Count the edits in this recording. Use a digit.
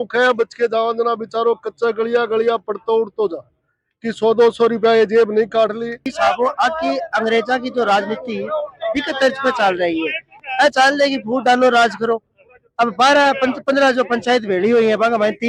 1